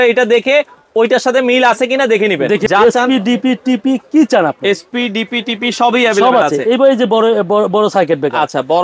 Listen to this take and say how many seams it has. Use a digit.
1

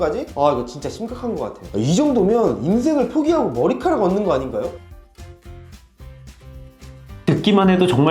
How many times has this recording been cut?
0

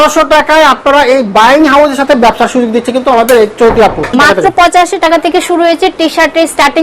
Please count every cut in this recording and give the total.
1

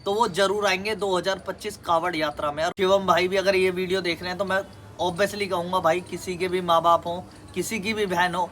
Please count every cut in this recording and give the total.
1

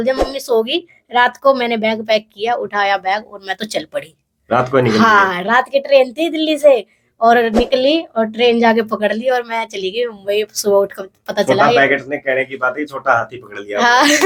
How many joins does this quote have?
0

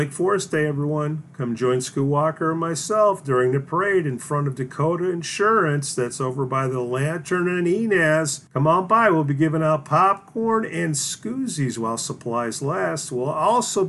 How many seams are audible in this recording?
1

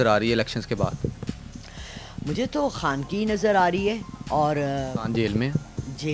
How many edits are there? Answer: 0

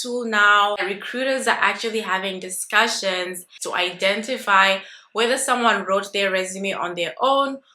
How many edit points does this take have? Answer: 2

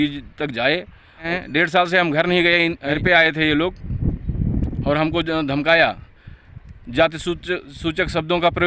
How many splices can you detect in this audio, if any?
2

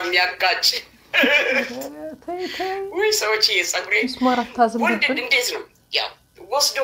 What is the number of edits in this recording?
1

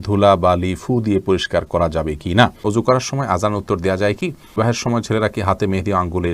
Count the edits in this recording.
2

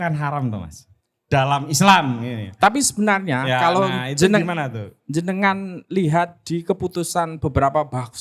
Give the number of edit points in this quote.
0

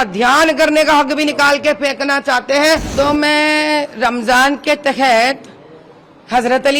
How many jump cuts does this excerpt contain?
1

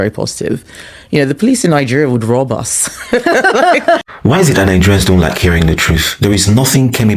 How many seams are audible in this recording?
1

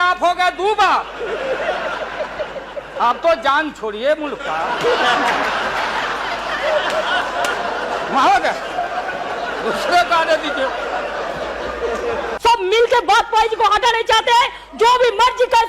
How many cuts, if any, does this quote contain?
1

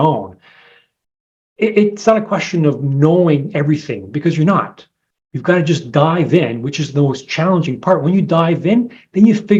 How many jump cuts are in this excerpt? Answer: 0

